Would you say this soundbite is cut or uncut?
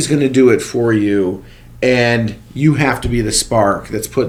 uncut